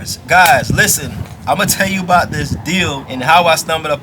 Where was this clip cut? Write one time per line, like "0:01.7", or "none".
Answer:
0:03.1